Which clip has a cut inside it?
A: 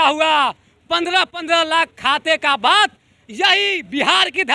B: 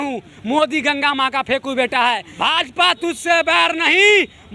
B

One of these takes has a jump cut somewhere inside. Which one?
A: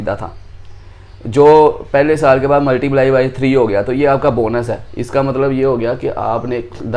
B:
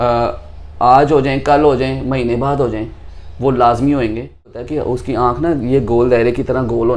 B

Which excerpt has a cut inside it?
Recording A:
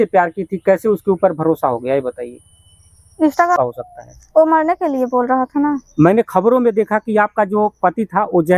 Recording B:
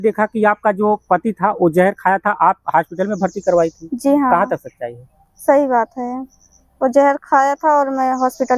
A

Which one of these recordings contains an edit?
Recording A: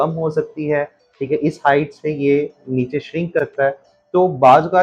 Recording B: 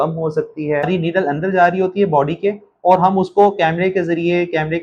B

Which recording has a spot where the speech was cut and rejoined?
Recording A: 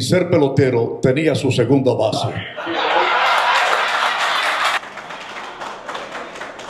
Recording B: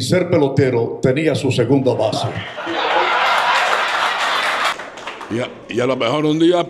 B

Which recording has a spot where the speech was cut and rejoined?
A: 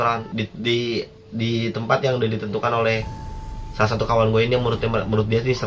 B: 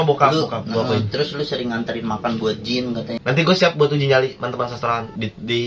B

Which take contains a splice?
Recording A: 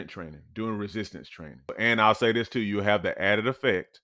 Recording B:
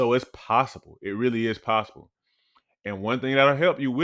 A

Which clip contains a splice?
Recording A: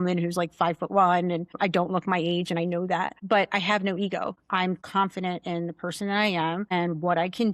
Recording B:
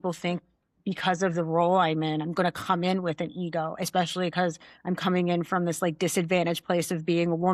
A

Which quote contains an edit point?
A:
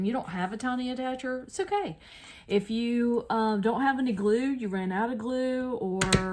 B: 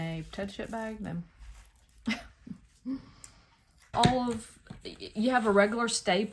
B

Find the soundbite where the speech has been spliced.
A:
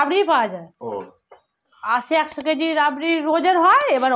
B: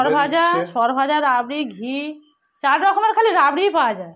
A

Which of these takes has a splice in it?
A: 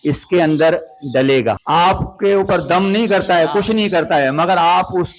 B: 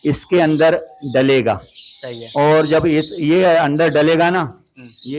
A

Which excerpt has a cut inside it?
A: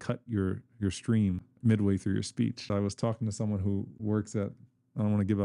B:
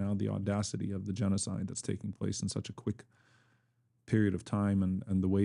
A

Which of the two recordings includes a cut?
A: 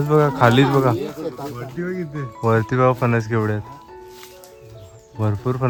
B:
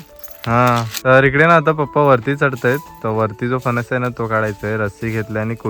B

